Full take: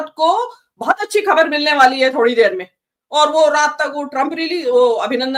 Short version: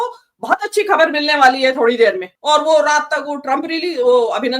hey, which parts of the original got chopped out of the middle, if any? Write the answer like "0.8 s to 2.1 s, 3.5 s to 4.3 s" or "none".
2.7 s to 3.0 s